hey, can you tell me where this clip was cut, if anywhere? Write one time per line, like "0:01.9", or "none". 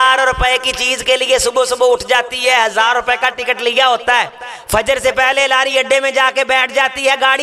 none

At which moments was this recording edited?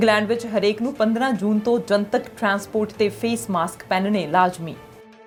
none

